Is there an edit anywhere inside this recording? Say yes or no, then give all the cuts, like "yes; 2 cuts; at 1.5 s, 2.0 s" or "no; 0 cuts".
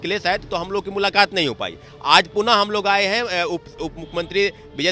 no; 0 cuts